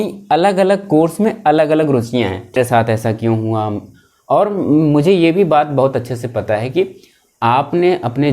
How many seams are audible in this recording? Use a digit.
1